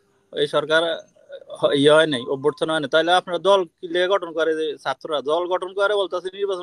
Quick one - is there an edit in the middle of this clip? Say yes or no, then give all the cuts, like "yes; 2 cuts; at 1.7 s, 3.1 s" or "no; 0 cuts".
no; 0 cuts